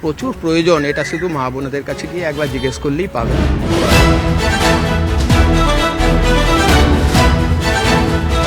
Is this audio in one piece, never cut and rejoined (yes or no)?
yes